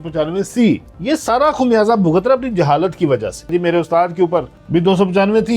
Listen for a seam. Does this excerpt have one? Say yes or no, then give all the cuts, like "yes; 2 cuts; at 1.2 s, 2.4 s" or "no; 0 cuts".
yes; 3 cuts; at 0.9 s, 3.5 s, 4.6 s